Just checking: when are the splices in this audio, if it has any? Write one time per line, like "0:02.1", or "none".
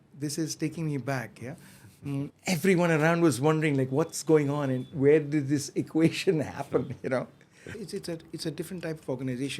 0:02.4
0:07.7